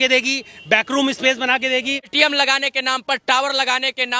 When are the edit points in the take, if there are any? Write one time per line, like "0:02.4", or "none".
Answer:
0:02.0